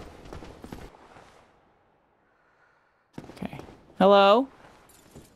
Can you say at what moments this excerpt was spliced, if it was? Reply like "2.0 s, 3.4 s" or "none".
0.9 s

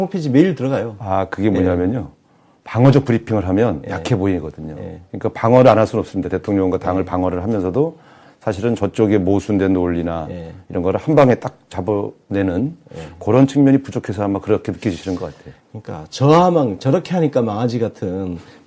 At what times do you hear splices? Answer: none

